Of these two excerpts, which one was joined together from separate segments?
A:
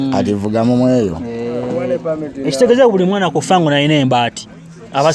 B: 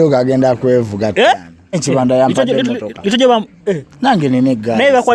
B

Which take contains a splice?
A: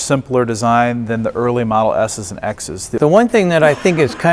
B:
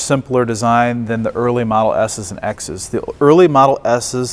A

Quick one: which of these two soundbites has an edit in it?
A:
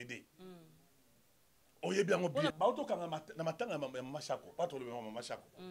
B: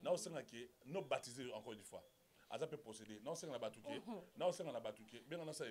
A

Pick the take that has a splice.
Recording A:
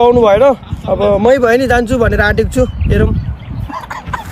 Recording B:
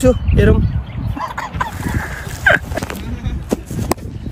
B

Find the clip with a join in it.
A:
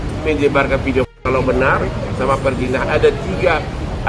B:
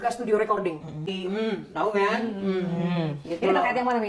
B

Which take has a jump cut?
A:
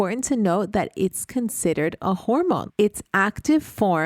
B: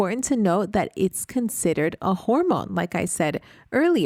A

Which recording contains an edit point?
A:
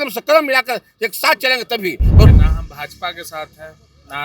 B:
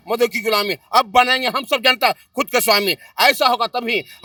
A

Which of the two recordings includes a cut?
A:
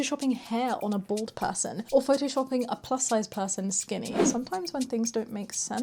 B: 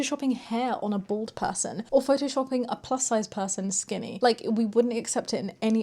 A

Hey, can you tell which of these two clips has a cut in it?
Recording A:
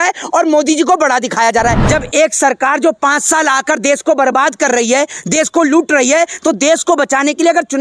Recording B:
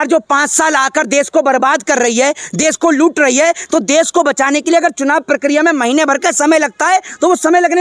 A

